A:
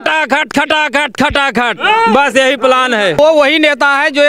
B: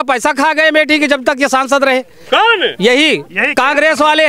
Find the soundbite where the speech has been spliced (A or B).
A